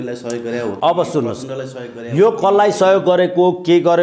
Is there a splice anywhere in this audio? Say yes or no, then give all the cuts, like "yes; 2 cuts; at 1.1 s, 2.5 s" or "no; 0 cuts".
no; 0 cuts